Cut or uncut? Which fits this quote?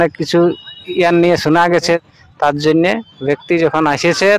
cut